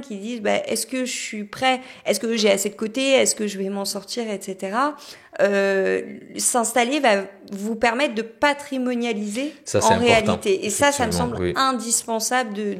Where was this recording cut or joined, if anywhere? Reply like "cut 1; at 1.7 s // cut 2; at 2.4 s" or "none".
none

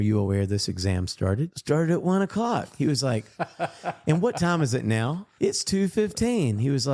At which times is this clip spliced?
cut 1; at 1.6 s

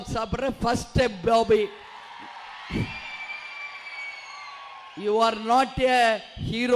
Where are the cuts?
none

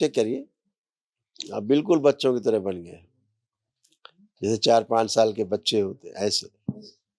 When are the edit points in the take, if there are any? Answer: none

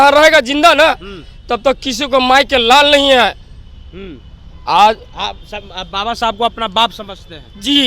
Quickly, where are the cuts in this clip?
none

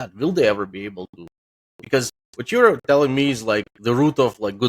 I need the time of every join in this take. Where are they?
none

